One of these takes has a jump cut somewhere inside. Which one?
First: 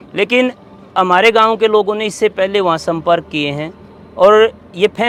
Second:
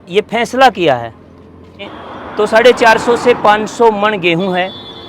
second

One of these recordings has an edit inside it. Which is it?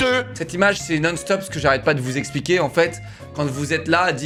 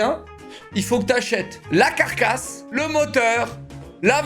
second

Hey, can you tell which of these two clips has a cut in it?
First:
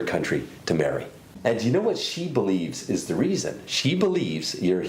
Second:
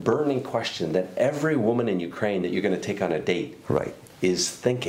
first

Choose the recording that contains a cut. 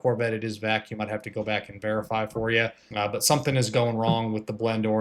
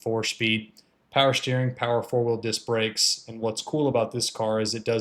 first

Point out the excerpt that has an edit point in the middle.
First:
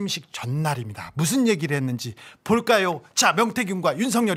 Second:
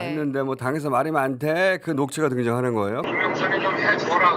second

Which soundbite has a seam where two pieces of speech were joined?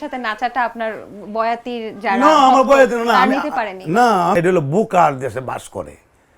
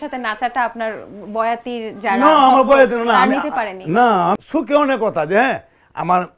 second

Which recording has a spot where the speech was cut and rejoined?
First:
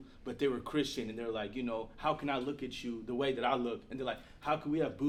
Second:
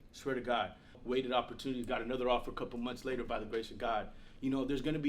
second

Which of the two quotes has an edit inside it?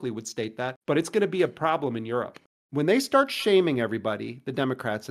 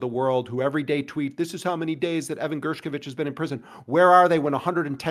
first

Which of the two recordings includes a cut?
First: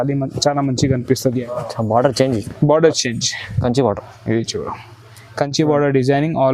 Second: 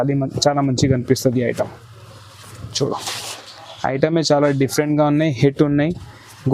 first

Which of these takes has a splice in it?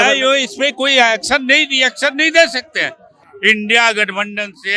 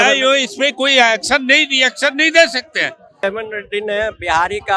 second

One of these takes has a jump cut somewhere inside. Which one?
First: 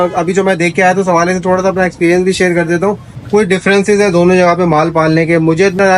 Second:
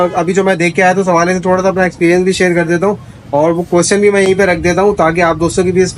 first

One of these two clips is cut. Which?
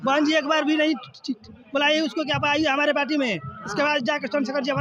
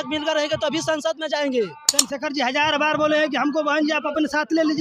second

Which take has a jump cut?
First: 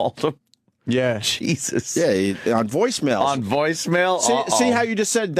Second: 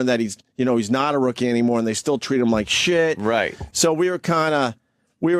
first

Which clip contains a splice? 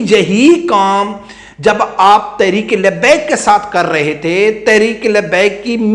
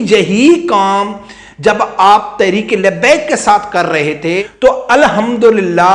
second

